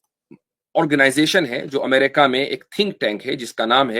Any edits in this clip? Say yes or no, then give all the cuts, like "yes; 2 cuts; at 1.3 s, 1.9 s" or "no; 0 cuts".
no; 0 cuts